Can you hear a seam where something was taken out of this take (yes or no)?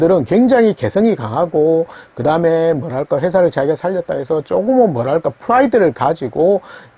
no